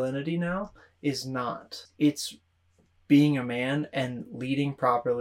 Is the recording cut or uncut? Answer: cut